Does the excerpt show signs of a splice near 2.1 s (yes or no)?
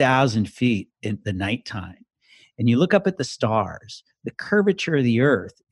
no